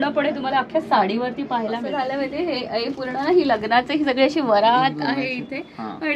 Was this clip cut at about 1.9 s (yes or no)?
yes